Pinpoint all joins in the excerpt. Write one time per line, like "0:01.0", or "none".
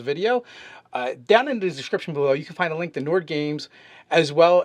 0:02.4